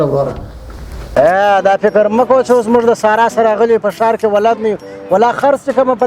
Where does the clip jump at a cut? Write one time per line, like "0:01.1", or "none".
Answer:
0:01.1